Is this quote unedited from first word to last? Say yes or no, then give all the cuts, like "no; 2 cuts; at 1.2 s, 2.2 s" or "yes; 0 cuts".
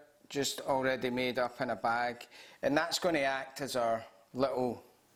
yes; 0 cuts